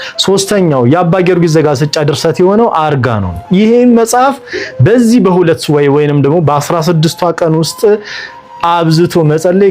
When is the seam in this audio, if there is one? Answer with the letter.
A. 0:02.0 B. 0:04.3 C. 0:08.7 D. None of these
A